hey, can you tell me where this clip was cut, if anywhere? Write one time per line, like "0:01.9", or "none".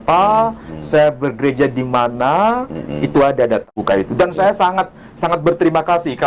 0:03.7